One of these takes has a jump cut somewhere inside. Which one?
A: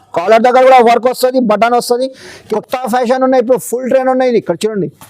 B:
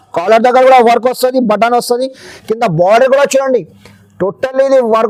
A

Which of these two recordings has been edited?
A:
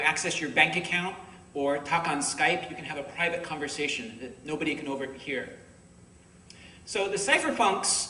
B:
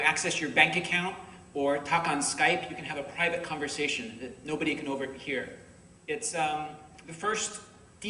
A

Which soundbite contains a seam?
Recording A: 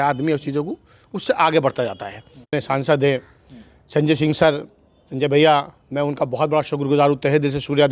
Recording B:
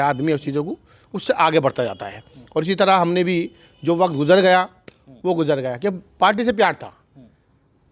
A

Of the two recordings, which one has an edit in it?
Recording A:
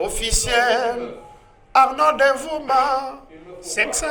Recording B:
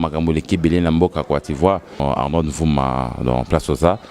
B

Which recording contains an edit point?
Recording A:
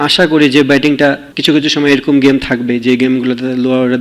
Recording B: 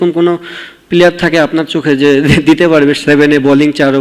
A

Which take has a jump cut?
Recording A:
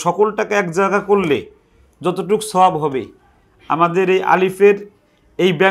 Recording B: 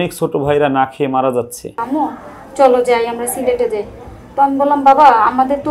B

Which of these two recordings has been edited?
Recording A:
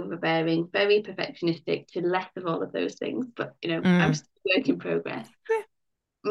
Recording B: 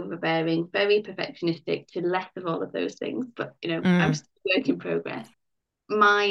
B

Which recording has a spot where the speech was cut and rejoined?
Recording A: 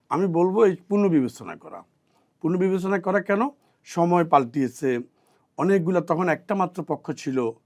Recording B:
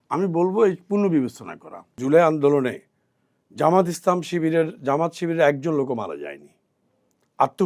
B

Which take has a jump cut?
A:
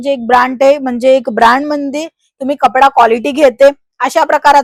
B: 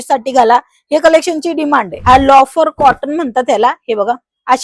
B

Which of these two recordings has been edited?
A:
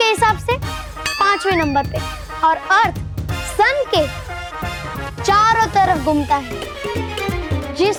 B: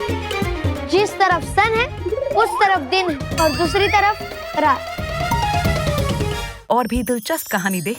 B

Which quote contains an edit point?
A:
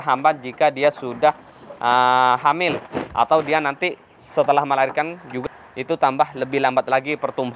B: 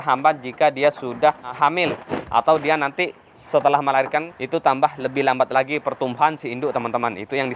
B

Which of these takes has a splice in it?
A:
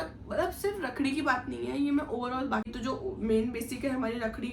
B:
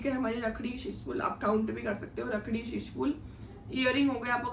A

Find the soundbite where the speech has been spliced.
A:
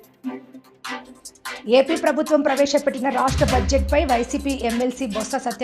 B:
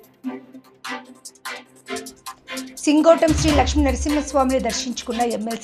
A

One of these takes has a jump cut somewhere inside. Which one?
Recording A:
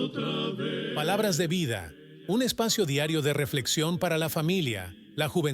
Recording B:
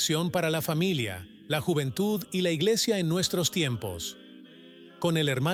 A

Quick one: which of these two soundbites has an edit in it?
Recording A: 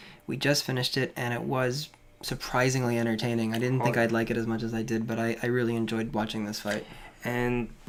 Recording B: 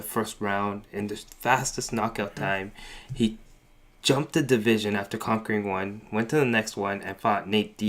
B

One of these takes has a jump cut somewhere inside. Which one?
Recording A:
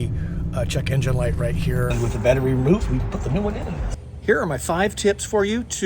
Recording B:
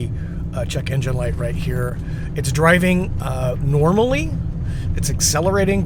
A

